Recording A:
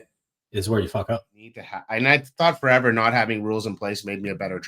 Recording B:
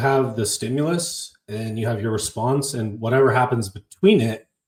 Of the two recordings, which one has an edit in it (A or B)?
A